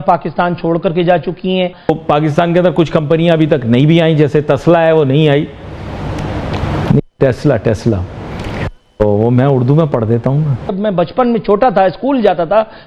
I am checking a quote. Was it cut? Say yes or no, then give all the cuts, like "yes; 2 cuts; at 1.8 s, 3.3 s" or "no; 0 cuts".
yes; 2 cuts; at 1.8 s, 10.8 s